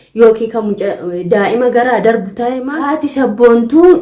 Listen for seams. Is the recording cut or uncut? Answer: cut